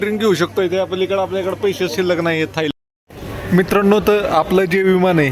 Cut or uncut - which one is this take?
cut